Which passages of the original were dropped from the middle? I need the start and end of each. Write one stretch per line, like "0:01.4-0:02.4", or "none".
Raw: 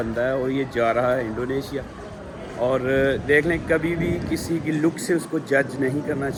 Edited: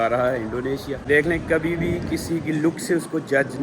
0:01.9-0:03.2